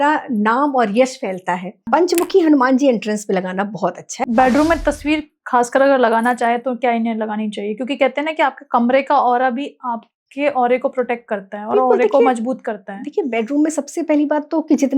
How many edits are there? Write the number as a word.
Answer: two